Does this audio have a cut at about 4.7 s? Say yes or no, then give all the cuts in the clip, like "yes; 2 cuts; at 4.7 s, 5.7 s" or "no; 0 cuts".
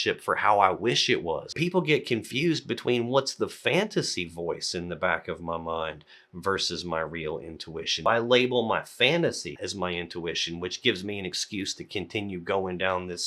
no; 3 cuts; at 1.5 s, 8.1 s, 9.6 s